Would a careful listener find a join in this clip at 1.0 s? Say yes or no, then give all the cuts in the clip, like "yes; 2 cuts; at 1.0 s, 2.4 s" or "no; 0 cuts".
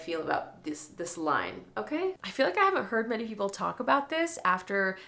no; 1 cut; at 2.2 s